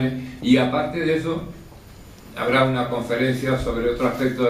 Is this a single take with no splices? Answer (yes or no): no